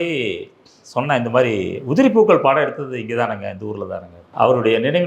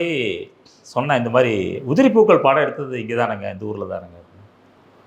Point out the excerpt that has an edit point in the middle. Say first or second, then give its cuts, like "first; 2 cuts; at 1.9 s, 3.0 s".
first; 1 cut; at 4.2 s